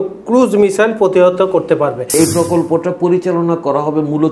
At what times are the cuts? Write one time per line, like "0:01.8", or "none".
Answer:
0:02.1